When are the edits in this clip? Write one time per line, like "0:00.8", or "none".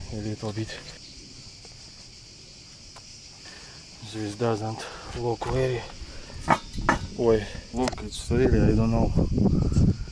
0:00.9
0:03.4
0:07.6

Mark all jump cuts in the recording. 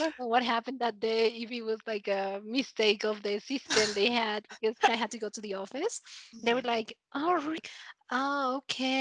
0:04.9
0:07.7

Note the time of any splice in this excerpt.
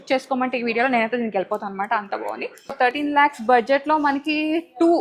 0:02.9

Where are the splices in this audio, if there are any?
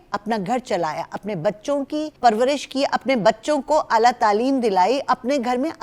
0:02.1

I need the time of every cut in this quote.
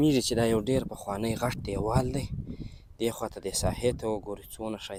none

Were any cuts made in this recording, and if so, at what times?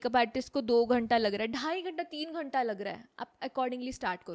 none

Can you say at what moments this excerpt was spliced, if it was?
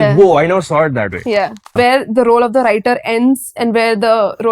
0:01.8

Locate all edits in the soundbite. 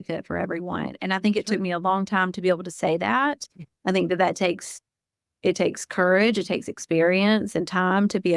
none

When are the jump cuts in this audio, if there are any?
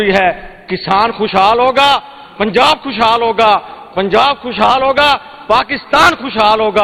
none

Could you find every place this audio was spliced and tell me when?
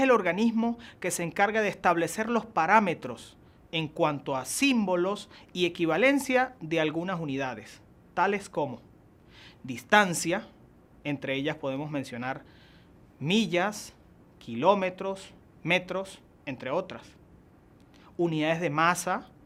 none

